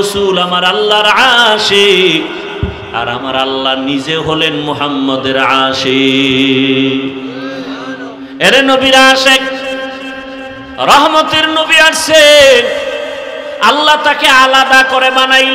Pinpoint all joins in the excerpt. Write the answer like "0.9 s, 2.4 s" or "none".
8.2 s